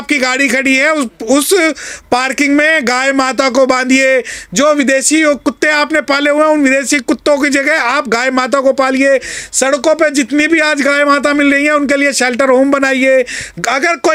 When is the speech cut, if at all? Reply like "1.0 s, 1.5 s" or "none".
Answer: none